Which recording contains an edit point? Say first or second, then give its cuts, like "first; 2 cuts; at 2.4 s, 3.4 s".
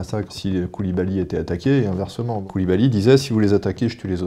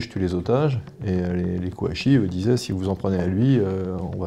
first; 1 cut; at 2.4 s